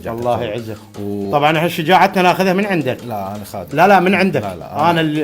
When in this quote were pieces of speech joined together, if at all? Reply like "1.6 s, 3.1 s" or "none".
1.3 s